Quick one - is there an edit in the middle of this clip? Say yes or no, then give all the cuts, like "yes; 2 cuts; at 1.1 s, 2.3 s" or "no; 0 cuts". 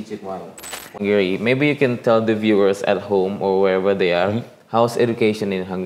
yes; 1 cut; at 1.0 s